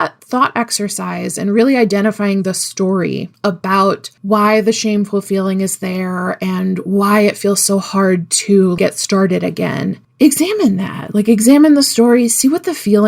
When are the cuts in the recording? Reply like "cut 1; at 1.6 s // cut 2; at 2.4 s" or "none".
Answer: cut 1; at 3.3 s // cut 2; at 4.1 s // cut 3; at 8.8 s